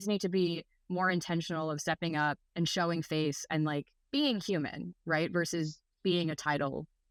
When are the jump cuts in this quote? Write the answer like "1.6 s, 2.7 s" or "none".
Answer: none